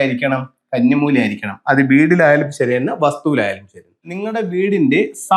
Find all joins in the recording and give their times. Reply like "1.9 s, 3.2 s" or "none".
4.1 s